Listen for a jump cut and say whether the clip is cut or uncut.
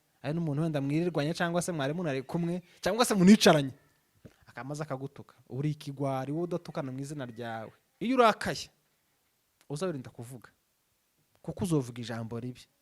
cut